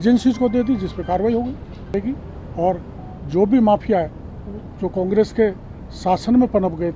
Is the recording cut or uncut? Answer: cut